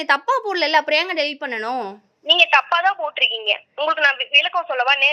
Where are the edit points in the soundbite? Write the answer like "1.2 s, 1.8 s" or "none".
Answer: none